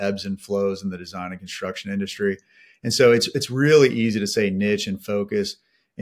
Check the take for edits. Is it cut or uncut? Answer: uncut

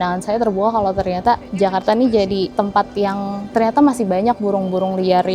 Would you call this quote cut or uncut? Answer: uncut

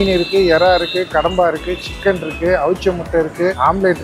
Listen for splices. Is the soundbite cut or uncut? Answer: uncut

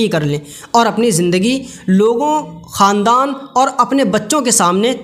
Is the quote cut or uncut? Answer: uncut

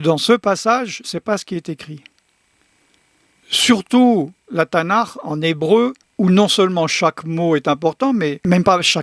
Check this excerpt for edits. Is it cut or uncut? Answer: uncut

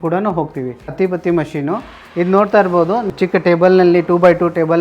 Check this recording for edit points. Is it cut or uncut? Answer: cut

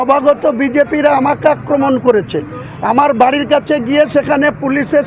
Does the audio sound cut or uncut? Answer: uncut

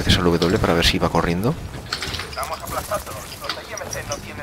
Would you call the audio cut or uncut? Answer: cut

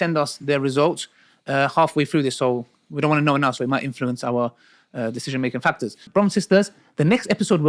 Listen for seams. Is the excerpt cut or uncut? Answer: cut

